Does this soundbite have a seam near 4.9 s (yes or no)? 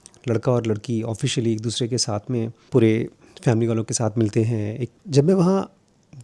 yes